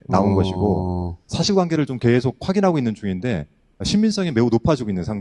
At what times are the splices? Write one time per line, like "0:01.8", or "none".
none